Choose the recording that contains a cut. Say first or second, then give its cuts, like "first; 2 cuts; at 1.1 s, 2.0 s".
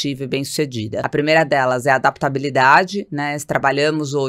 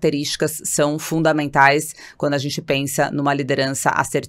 first; 1 cut; at 1.1 s